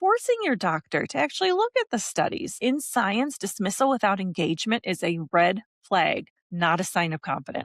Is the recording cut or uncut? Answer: cut